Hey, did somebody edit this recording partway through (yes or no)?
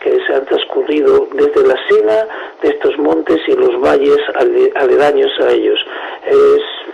yes